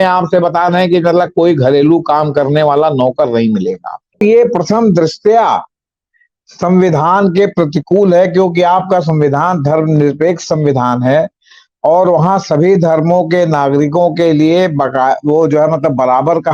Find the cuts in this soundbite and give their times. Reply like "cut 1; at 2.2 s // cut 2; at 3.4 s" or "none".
cut 1; at 4.2 s